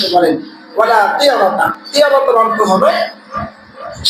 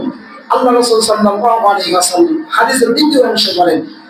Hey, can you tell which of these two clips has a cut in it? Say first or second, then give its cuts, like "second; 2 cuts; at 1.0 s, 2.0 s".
first; 1 cut; at 1.8 s